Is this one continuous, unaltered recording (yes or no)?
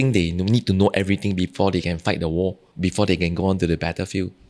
no